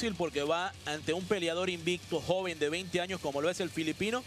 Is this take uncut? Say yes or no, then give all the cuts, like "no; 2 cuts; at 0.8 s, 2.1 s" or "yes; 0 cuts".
no; 1 cut; at 2.7 s